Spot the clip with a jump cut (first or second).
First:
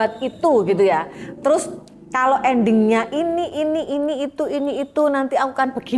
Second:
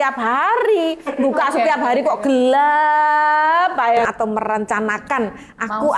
second